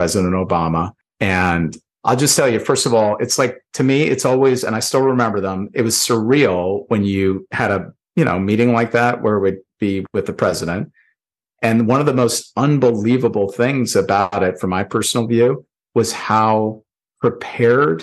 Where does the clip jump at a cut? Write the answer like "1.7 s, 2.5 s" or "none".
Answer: 1.0 s, 1.8 s